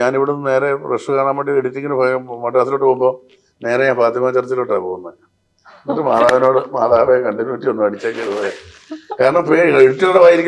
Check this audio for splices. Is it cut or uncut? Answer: uncut